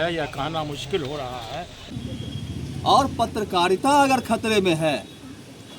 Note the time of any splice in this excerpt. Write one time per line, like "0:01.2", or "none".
0:01.9